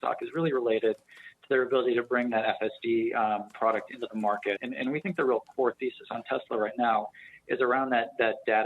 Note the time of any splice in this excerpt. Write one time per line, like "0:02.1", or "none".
0:04.7